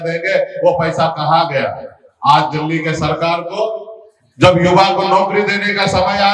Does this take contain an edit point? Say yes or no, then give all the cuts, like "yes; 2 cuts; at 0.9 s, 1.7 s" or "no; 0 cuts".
no; 0 cuts